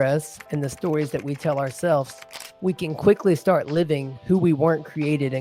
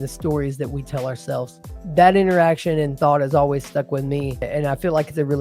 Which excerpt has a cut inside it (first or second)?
second